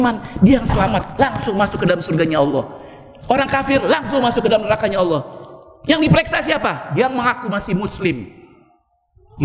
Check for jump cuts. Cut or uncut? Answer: uncut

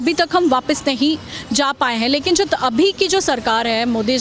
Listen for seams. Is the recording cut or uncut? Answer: uncut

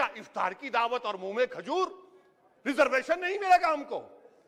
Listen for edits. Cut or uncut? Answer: uncut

